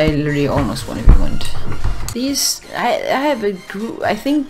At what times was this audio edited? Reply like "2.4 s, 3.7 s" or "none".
2.0 s